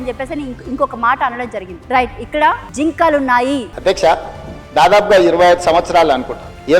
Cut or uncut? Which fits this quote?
cut